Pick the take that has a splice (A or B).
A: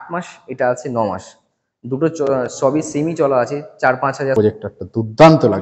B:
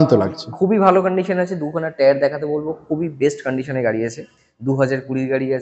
A